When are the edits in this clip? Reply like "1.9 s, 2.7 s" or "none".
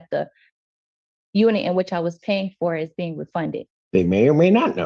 3.7 s